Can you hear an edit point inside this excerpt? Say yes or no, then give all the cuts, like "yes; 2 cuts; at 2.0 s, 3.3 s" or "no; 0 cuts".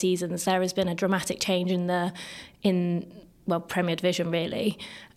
no; 0 cuts